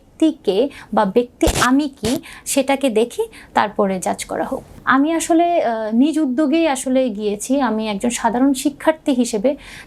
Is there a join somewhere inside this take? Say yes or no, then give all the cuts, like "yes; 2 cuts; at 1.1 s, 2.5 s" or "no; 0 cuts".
yes; 1 cut; at 4.7 s